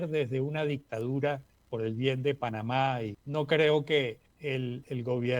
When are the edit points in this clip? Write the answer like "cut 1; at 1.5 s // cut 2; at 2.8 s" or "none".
cut 1; at 1.6 s // cut 2; at 3.2 s // cut 3; at 4.3 s